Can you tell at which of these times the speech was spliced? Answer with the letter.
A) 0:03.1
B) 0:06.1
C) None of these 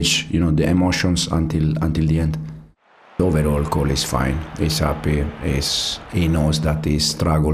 A